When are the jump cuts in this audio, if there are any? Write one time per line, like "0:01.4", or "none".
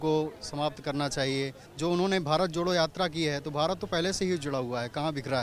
0:01.6